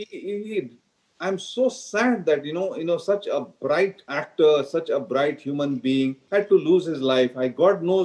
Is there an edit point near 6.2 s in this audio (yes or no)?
yes